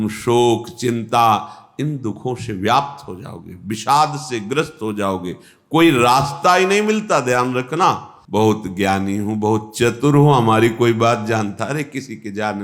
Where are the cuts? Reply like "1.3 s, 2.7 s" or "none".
8.1 s